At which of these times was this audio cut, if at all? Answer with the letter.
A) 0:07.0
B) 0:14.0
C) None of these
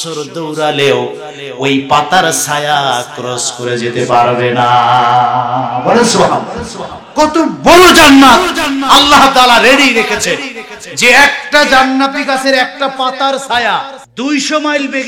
B